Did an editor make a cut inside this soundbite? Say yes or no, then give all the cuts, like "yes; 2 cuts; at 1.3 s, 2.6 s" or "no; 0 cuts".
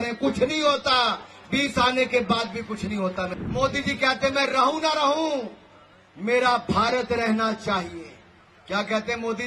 yes; 1 cut; at 3.4 s